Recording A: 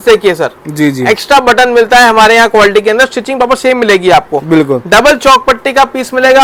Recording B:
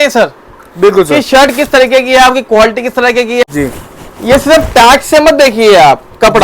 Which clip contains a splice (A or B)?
B